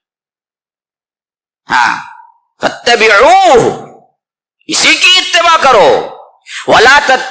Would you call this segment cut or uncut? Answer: uncut